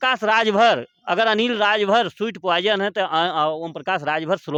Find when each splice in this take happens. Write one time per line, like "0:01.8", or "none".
none